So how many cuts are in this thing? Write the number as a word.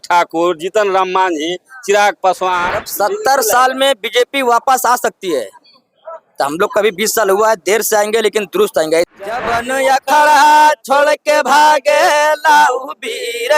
two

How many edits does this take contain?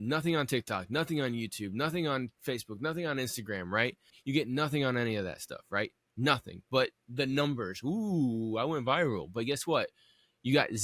one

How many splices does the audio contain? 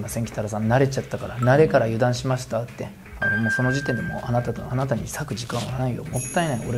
zero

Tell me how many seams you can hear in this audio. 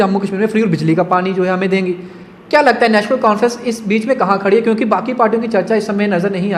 zero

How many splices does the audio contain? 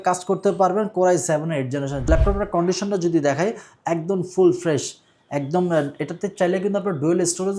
one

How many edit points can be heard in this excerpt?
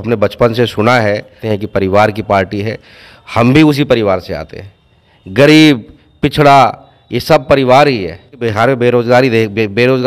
two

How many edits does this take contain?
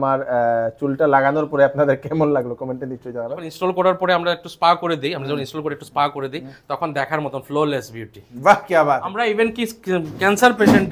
two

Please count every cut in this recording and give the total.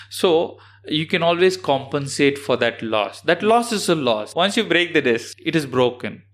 two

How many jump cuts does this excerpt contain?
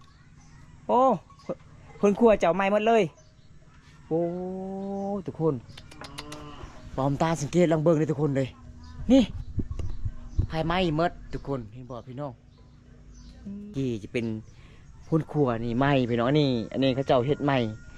one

